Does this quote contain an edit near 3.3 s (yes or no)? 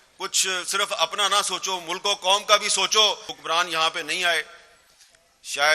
yes